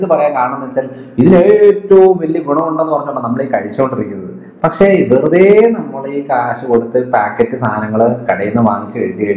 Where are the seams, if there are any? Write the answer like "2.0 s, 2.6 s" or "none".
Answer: none